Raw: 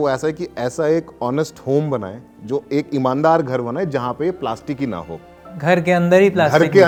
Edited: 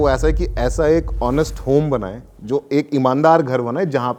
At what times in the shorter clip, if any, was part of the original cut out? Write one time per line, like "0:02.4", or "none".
none